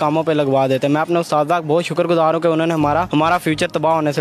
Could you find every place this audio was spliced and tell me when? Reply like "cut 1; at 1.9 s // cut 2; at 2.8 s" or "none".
cut 1; at 3.1 s